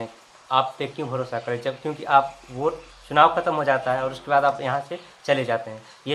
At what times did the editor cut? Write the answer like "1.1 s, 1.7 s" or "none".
none